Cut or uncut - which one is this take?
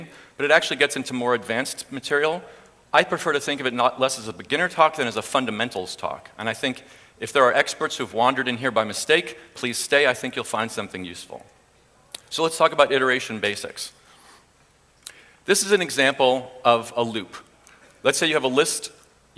cut